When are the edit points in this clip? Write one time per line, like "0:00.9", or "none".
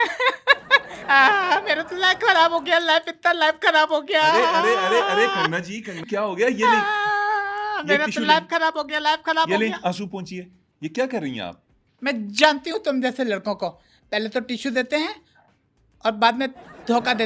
none